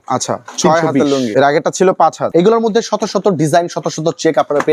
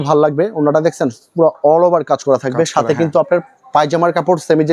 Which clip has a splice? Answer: first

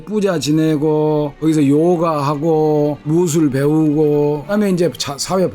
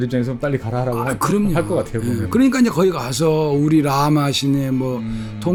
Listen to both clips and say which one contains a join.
first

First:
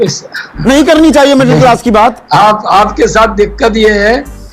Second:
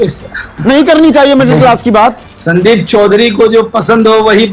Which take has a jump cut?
second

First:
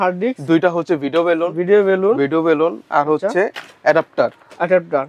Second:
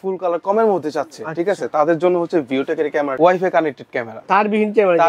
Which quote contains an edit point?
second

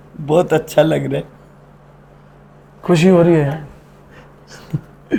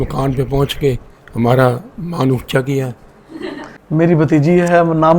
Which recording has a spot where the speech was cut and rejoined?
second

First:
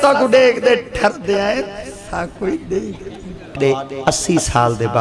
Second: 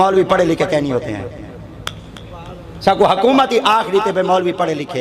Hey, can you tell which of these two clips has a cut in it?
first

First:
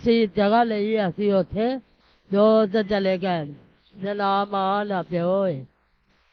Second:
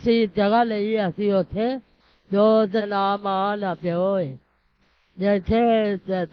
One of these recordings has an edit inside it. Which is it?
second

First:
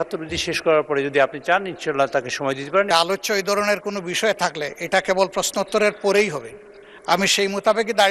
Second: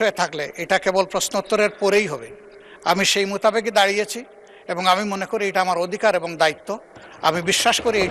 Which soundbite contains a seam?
first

